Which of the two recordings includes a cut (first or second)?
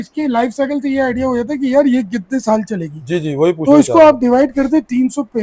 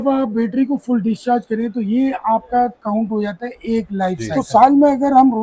second